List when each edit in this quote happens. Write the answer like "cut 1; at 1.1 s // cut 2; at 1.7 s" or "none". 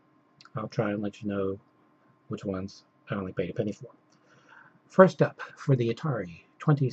cut 1; at 1.1 s